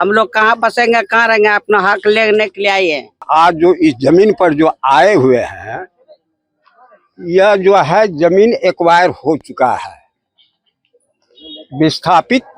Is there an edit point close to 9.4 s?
no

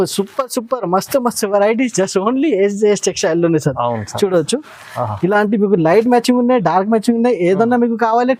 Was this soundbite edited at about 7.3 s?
no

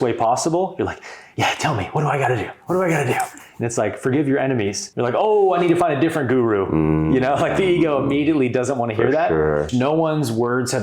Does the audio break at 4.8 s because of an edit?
yes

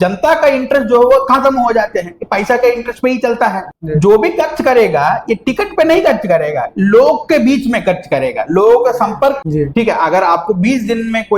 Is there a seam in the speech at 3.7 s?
yes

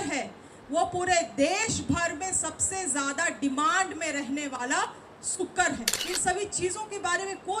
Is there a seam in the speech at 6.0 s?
yes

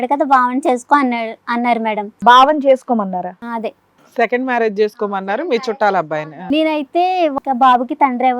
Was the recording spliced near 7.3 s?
yes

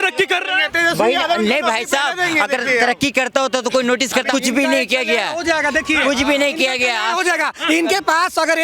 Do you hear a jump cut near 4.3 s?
yes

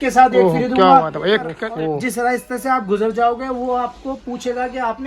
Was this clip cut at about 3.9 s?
no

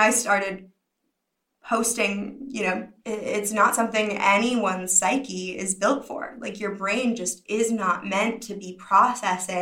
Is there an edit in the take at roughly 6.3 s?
no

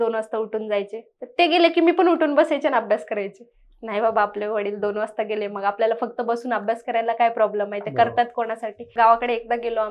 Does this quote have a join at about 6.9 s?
no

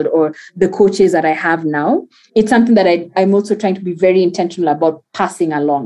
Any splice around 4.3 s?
no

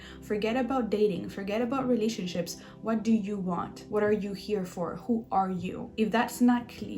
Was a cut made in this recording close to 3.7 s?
yes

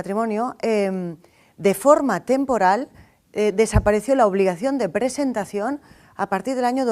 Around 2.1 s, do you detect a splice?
yes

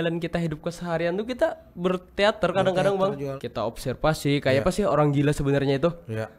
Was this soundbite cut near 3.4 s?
yes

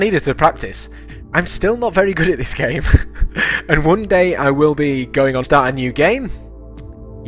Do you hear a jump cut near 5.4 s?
no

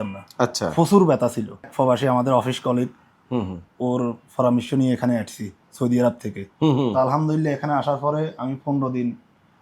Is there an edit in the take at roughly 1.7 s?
yes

